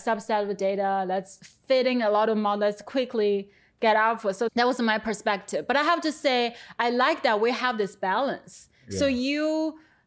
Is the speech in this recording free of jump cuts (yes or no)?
yes